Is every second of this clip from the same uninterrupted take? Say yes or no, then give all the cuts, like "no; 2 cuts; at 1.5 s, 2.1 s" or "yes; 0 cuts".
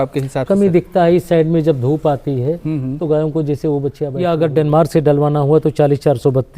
no; 1 cut; at 4.1 s